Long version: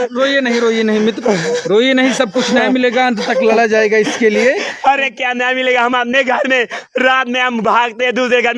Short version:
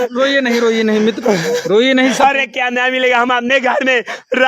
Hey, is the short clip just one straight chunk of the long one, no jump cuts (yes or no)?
no